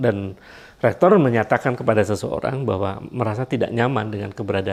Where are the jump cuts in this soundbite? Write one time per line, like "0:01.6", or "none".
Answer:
none